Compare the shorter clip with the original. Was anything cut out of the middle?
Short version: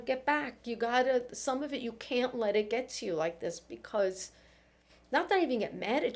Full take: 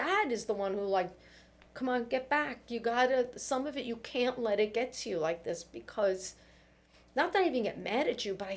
no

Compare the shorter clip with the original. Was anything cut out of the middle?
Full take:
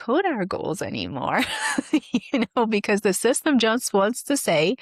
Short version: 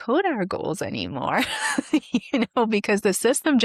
no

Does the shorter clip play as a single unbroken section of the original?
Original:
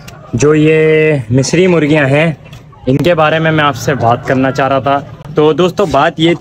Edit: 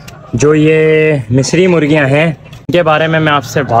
no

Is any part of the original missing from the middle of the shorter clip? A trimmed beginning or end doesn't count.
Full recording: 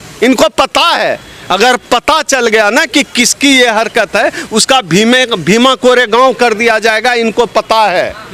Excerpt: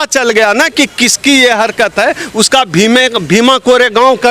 no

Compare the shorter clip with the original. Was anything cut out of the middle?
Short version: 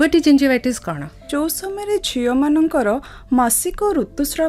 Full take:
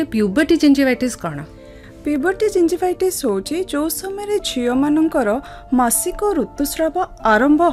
yes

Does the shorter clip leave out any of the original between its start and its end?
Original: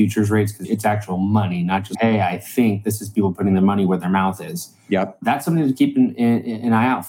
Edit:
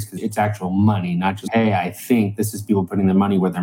no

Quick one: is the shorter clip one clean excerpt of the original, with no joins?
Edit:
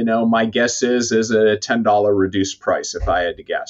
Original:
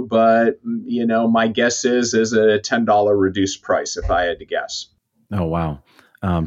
yes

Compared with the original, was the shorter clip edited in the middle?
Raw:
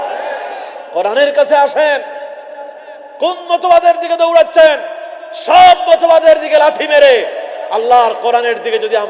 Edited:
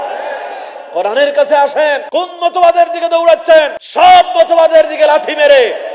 yes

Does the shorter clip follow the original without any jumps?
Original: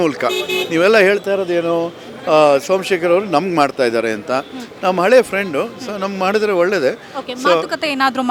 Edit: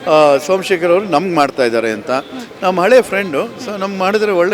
yes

